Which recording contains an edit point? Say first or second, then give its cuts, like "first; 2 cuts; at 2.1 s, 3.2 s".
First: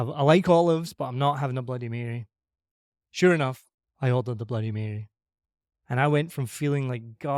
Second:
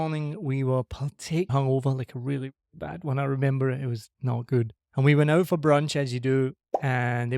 second; 2 cuts; at 1.5 s, 4.8 s